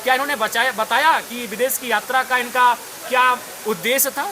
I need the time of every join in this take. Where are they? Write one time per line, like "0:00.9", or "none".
none